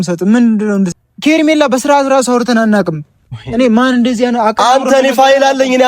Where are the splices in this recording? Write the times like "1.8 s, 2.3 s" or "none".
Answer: 1.0 s